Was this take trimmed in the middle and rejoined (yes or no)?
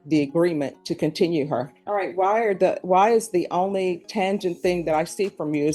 yes